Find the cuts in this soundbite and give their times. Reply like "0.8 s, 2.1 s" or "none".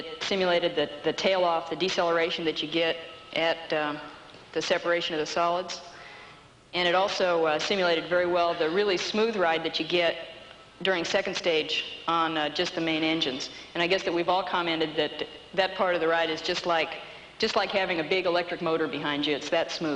13.6 s